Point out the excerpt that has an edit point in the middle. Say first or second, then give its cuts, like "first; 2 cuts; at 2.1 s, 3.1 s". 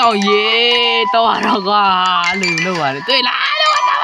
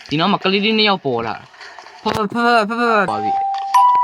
second; 1 cut; at 3.1 s